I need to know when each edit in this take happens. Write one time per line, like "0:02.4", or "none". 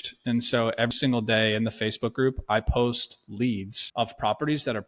0:03.8